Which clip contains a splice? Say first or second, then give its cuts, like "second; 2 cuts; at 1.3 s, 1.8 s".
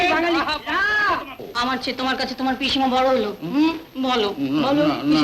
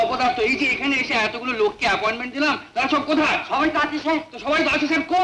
first; 1 cut; at 1.4 s